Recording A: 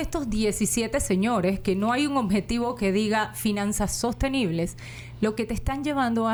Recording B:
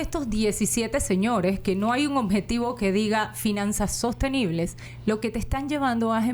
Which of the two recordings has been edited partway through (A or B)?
B